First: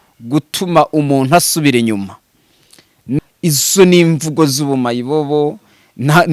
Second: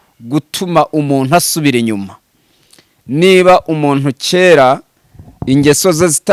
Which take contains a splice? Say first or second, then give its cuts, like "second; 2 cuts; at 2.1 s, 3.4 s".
first; 1 cut; at 3.0 s